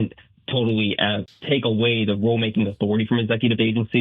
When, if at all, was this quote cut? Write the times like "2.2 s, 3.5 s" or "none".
1.2 s